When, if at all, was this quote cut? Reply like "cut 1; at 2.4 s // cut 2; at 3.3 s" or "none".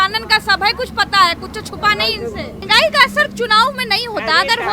cut 1; at 2.6 s